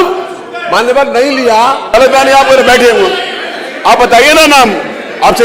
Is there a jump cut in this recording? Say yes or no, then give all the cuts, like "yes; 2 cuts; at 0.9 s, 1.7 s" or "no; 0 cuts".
yes; 1 cut; at 1.9 s